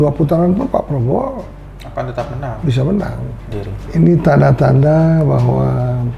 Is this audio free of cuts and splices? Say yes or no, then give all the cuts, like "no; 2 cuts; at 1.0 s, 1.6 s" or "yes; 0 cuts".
no; 1 cut; at 3.5 s